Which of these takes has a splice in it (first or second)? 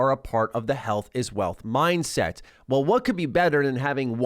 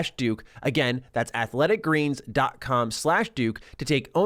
first